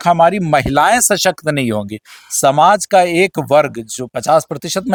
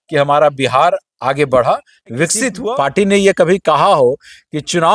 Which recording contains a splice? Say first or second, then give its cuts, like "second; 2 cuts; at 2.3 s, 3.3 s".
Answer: second; 1 cut; at 2.6 s